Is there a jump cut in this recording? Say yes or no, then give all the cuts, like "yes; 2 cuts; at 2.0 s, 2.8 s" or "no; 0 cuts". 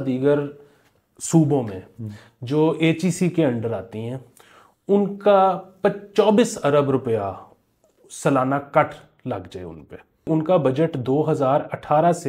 yes; 1 cut; at 10.3 s